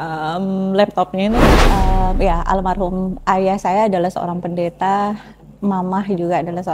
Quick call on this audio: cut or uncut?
cut